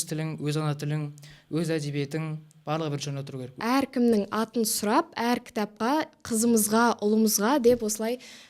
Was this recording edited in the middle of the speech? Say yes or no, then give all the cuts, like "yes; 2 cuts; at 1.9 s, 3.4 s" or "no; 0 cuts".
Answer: yes; 1 cut; at 3.6 s